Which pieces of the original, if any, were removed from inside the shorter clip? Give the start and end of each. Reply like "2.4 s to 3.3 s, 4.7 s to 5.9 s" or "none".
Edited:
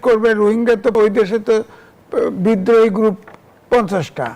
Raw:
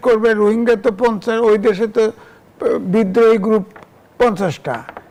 0.9 s to 1.4 s

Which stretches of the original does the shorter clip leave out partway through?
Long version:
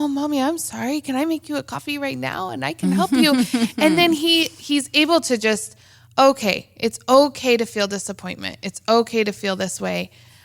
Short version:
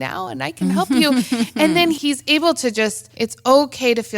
4.2 s to 4.6 s, 5.7 s to 6.7 s

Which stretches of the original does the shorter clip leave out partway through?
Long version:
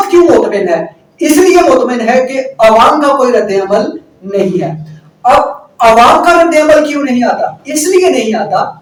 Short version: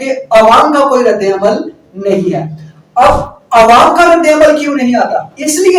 none

